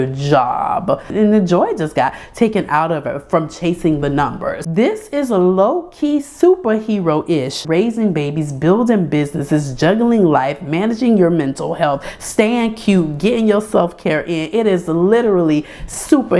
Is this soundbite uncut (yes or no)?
no